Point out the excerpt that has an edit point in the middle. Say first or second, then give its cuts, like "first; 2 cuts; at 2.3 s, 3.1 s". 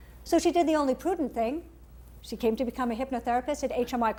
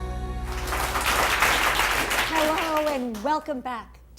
second; 1 cut; at 2.9 s